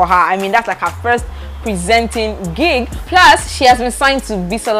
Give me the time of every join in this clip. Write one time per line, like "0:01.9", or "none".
none

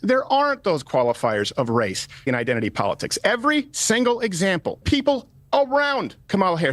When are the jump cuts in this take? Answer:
0:02.3
0:05.2

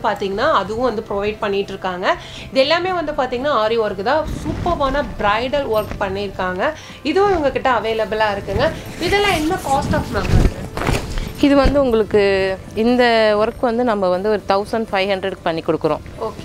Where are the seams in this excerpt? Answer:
none

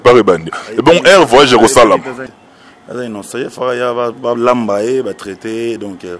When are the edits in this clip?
0:02.3

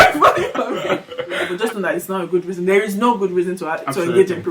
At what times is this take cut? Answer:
0:01.5

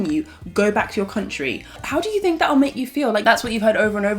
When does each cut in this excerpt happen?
0:01.8
0:03.2

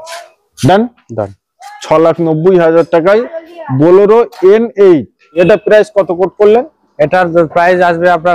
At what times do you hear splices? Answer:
0:05.4

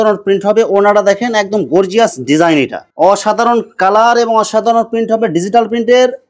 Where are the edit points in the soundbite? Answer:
0:02.8

